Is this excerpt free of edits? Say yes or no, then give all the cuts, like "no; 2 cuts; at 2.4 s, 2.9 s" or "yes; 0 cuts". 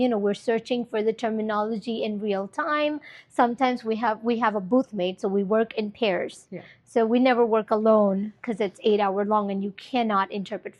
yes; 0 cuts